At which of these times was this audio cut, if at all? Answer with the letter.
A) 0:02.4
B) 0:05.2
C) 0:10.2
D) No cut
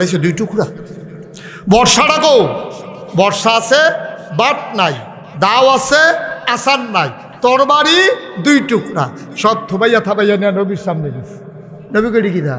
D